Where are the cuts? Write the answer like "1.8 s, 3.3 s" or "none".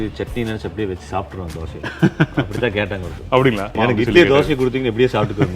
3.7 s